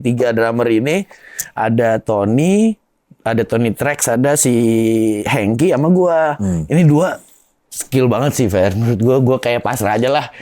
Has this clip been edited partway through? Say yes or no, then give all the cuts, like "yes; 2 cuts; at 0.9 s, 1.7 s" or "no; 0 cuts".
no; 0 cuts